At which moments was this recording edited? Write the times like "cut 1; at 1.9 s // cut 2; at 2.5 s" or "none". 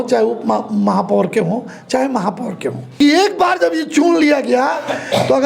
cut 1; at 2.8 s